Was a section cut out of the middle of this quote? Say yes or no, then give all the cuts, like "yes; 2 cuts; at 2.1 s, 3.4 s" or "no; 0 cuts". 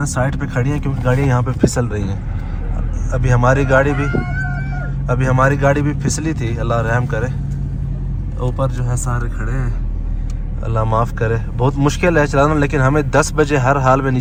no; 0 cuts